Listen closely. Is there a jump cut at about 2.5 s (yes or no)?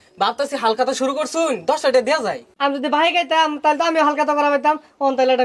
yes